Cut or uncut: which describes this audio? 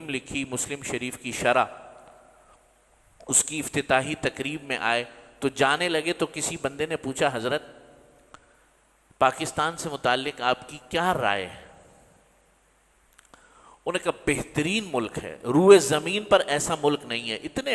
uncut